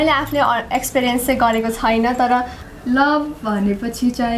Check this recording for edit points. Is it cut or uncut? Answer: cut